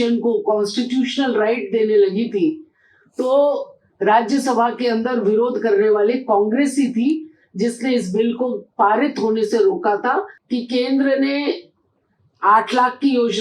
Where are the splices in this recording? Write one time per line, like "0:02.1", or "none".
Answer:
0:10.4